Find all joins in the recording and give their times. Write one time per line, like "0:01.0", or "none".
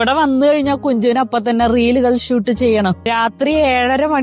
0:03.0

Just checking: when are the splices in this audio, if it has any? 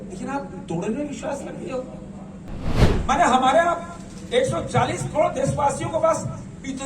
0:02.7

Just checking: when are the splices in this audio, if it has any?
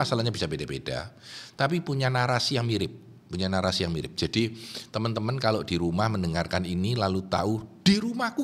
none

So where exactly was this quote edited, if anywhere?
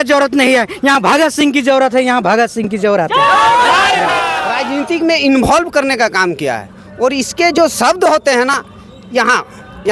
0:04.5

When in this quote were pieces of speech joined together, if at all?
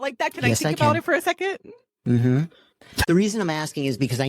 0:02.9

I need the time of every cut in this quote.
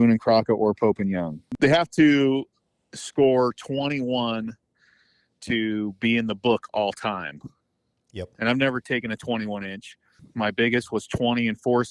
0:01.5

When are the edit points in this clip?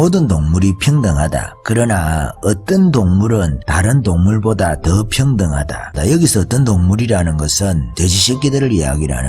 0:03.6
0:05.9
0:07.9

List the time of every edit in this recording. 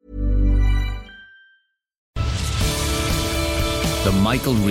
0:02.1

